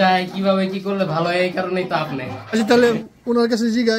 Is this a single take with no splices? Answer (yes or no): no